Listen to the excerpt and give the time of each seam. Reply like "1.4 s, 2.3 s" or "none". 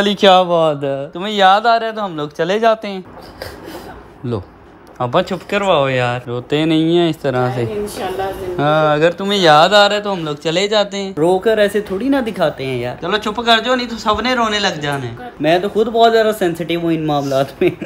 none